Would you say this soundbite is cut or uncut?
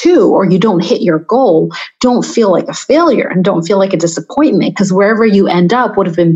uncut